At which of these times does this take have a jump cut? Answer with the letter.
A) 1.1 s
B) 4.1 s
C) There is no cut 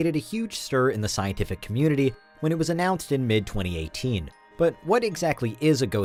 C